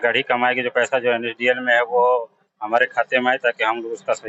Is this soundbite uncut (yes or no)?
yes